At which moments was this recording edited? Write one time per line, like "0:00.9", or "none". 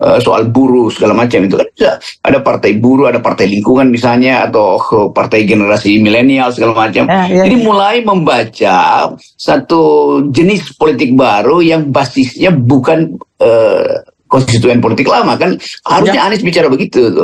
none